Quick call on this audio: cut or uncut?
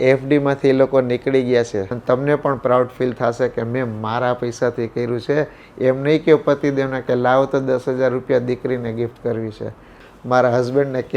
cut